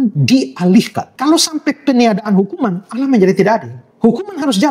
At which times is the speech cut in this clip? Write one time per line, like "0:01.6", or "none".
0:01.0
0:03.8

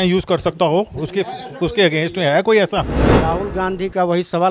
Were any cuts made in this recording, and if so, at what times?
0:02.9

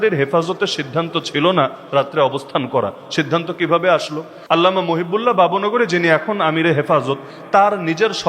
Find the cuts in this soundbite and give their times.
0:04.4

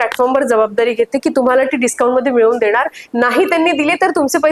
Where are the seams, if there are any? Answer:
none

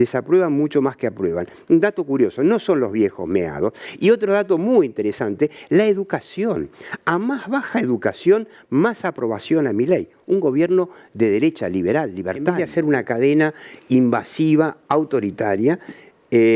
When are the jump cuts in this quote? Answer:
0:12.6

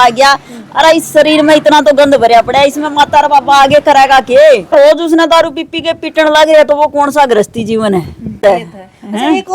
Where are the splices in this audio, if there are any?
0:04.7
0:08.4

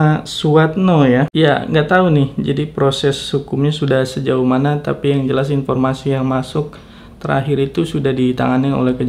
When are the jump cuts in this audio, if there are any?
0:01.3

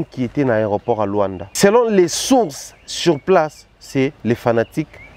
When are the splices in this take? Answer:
0:01.6

